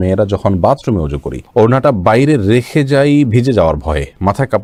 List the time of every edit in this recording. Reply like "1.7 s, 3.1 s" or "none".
none